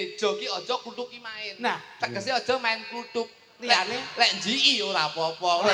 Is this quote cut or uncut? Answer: uncut